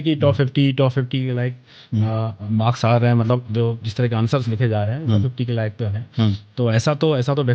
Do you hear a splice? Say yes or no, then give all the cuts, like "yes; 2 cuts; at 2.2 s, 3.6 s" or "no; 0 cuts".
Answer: no; 0 cuts